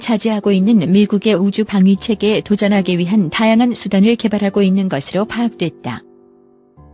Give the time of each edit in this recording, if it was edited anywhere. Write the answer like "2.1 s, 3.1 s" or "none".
6.1 s